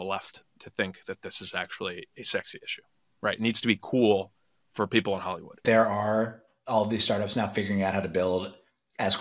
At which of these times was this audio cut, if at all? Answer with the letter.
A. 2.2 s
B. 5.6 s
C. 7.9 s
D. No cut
B